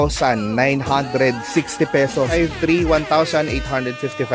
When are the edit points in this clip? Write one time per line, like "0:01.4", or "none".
0:02.3